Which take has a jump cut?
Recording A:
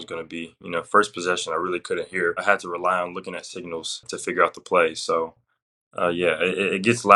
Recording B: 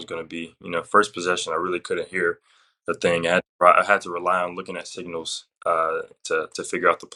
A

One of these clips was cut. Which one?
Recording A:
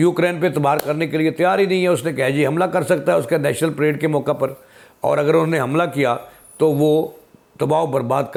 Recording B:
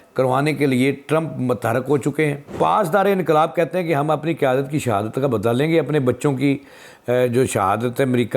B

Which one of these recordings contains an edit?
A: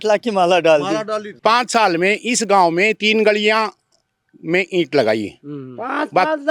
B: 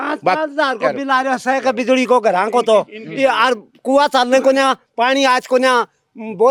A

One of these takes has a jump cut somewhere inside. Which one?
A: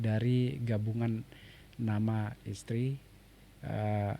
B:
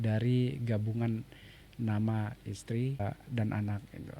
B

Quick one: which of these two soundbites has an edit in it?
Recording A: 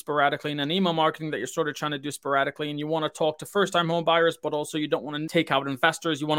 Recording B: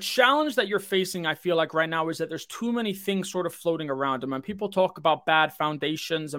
A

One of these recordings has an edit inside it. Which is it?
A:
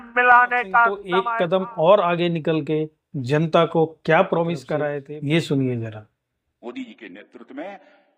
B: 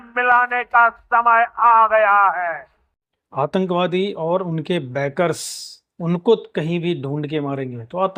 A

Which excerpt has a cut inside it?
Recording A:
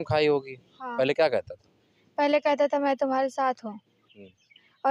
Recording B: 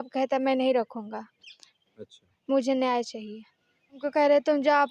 B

